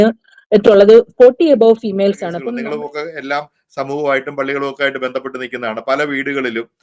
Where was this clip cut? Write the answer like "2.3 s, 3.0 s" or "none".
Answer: 2.4 s